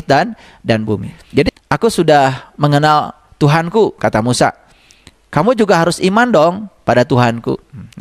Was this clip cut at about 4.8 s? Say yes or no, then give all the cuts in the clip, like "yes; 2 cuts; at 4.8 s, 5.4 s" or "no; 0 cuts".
no; 1 cut; at 1.5 s